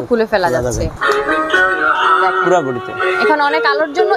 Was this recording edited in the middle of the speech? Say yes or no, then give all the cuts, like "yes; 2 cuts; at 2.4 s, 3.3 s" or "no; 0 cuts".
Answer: yes; 1 cut; at 0.9 s